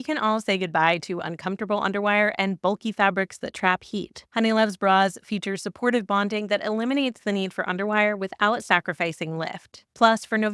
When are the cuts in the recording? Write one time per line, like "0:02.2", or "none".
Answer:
none

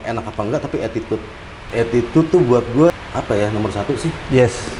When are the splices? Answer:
0:01.5
0:02.9

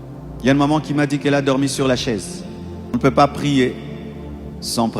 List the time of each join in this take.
0:02.9

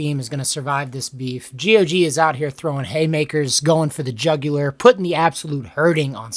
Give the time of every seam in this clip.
none

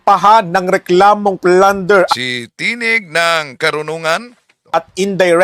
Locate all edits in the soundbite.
none

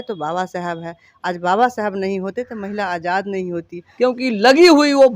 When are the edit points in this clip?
0:03.9

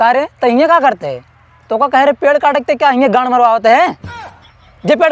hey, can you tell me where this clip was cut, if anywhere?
none

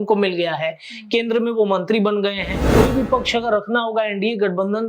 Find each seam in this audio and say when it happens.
0:02.5

